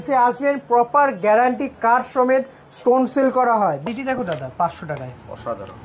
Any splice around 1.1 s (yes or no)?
no